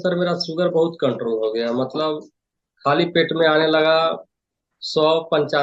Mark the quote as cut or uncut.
uncut